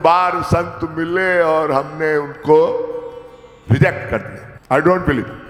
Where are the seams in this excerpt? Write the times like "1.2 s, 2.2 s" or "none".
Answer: none